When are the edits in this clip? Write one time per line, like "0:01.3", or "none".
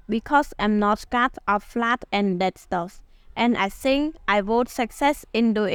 none